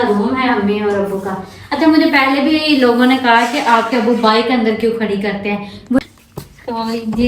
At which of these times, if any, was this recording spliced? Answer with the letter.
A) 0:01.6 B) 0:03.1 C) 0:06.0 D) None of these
C